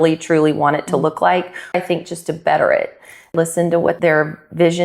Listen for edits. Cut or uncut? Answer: cut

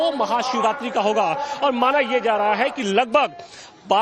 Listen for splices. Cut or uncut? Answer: uncut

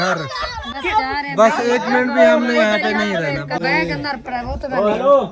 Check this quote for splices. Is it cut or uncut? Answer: cut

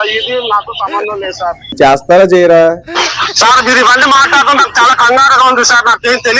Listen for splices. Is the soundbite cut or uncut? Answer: cut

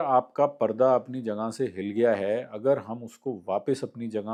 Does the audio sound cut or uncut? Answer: uncut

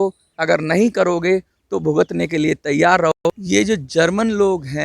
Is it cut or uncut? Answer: cut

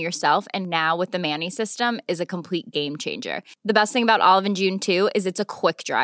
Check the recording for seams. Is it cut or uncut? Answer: uncut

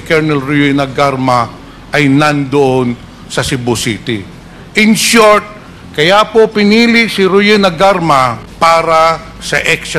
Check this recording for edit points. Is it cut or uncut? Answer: cut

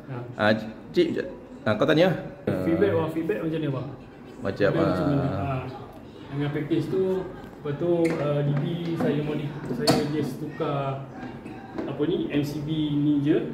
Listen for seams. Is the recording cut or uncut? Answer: cut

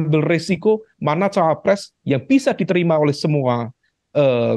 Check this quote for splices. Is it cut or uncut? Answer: cut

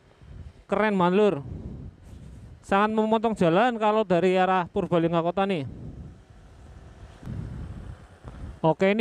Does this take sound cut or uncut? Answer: cut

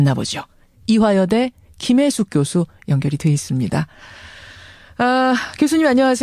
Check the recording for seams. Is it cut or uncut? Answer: cut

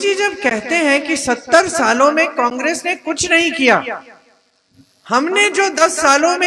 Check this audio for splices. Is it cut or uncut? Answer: uncut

